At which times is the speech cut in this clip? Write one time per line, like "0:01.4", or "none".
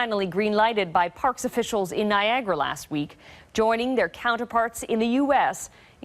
0:01.9